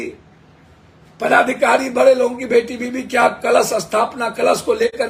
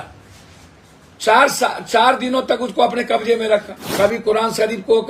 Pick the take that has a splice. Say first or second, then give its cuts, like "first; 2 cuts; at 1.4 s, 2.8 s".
second; 1 cut; at 3.8 s